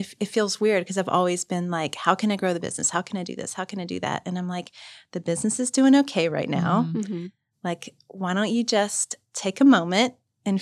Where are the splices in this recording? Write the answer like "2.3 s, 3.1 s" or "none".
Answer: none